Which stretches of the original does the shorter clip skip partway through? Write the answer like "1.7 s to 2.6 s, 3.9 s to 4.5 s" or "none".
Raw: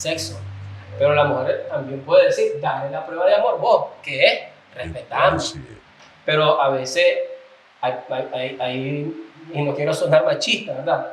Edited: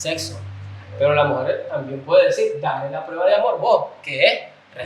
none